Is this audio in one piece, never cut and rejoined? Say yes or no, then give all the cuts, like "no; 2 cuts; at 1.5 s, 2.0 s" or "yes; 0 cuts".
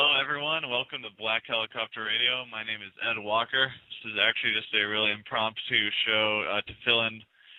yes; 0 cuts